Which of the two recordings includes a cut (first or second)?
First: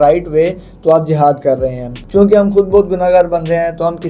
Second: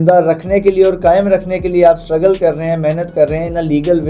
first